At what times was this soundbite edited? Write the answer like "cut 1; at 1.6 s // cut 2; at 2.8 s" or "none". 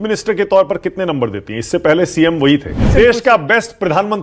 cut 1; at 2.9 s